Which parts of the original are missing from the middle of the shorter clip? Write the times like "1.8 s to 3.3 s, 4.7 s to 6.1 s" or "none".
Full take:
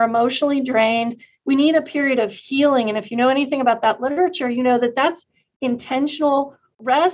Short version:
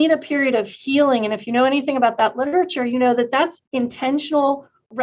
5.3 s to 5.5 s